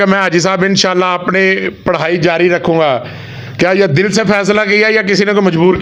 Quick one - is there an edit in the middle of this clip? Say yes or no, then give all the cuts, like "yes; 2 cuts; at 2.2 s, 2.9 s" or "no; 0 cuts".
no; 0 cuts